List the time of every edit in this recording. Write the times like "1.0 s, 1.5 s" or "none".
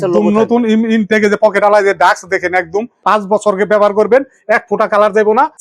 3.0 s